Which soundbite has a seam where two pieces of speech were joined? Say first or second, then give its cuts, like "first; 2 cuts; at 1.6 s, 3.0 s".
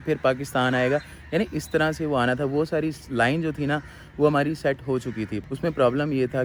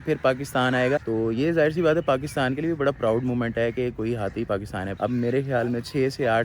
second; 2 cuts; at 1.0 s, 4.8 s